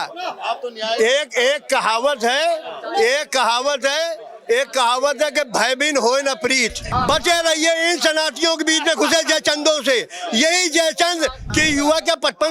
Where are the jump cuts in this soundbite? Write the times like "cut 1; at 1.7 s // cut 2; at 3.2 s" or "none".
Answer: cut 1; at 6.9 s // cut 2; at 11.4 s